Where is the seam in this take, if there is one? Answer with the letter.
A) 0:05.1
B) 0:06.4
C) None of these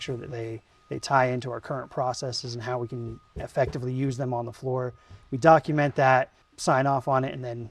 B